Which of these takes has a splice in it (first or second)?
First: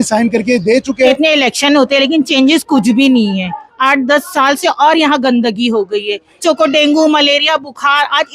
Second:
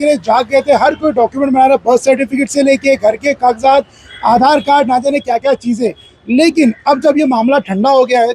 first